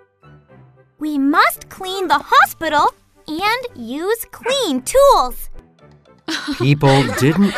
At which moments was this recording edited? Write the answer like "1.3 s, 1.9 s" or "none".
1.0 s